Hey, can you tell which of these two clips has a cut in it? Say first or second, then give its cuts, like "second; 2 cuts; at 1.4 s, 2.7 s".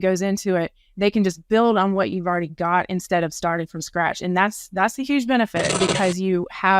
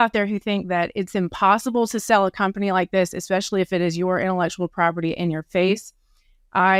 first; 1 cut; at 5.7 s